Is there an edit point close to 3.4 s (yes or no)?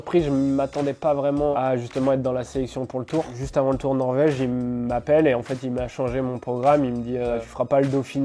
yes